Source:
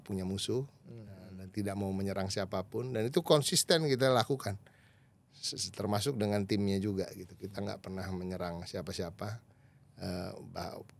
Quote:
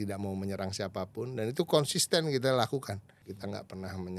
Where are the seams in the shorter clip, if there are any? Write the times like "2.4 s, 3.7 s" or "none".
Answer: 3.1 s